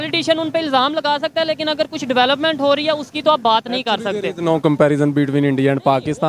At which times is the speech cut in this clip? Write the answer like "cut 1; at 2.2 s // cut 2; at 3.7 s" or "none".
none

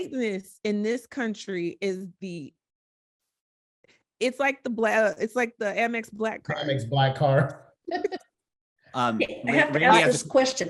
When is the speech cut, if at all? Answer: none

